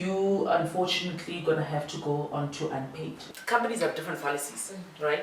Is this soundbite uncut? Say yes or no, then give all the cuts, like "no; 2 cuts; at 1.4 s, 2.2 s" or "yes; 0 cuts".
no; 1 cut; at 3.3 s